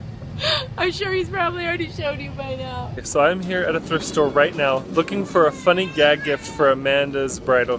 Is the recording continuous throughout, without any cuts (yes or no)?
yes